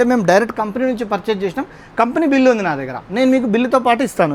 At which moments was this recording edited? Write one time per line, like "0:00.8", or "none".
none